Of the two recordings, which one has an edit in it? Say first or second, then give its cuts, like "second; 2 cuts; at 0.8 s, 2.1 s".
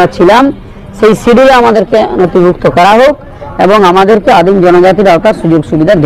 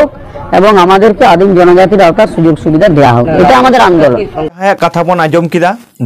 second; 1 cut; at 4.6 s